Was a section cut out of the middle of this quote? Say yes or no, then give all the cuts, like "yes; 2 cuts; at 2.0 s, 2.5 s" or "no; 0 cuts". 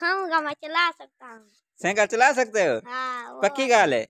no; 0 cuts